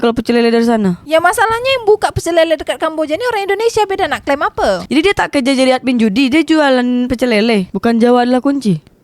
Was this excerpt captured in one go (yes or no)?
no